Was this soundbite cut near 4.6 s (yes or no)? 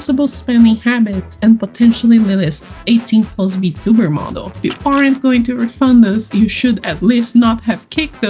yes